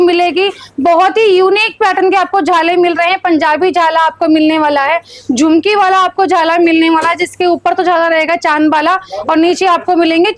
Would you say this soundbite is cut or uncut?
uncut